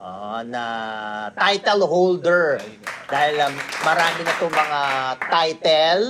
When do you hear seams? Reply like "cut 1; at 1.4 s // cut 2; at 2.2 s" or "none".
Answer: none

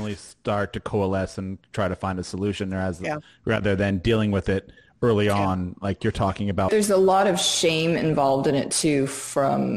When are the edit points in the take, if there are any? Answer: cut 1; at 6.7 s

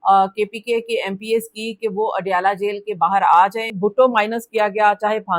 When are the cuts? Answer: cut 1; at 3.7 s

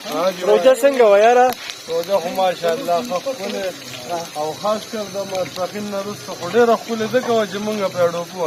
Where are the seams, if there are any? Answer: none

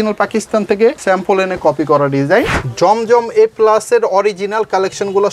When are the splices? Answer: cut 1; at 1.0 s // cut 2; at 2.6 s

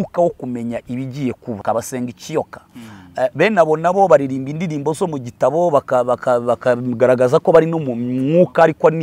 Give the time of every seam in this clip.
cut 1; at 1.6 s

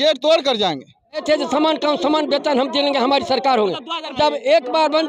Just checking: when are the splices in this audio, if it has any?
cut 1; at 1.2 s // cut 2; at 4.1 s

